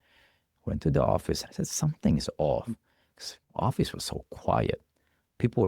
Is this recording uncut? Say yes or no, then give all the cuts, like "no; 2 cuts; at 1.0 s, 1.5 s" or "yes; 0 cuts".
no; 1 cut; at 1.5 s